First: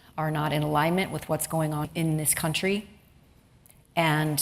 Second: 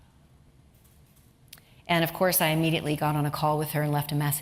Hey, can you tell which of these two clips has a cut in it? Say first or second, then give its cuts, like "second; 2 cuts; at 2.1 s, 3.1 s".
first; 1 cut; at 1.9 s